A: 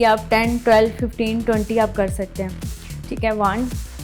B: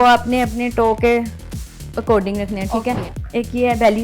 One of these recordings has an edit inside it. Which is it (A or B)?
B